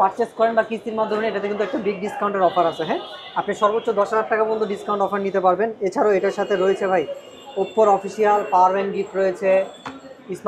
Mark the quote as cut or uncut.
uncut